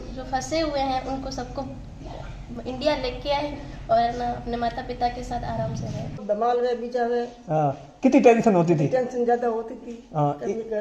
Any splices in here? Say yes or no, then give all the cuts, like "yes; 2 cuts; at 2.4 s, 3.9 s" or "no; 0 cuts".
yes; 1 cut; at 6.2 s